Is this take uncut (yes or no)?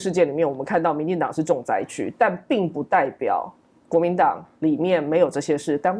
yes